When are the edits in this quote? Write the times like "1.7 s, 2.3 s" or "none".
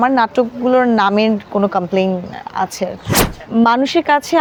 none

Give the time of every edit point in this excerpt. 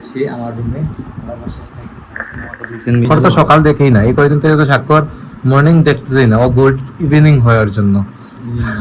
3.1 s

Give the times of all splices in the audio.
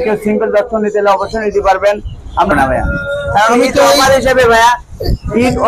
2.5 s

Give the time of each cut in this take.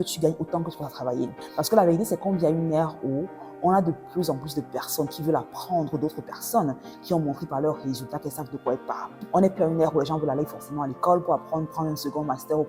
1.4 s, 9.1 s

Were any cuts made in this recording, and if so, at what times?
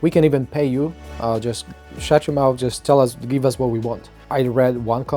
none

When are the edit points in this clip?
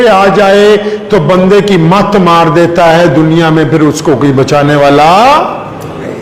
none

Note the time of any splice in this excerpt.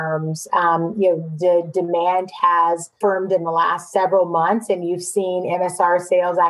2.9 s, 3.9 s

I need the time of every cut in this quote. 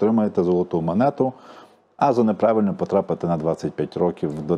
none

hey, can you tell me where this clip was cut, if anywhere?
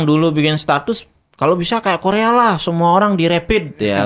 none

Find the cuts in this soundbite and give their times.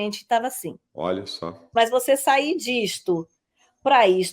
1.7 s

